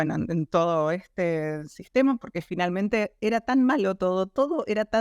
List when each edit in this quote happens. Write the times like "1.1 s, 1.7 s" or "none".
3.1 s